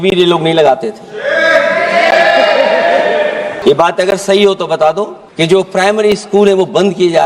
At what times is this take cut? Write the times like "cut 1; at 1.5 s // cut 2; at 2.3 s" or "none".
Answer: cut 1; at 3.5 s // cut 2; at 5.2 s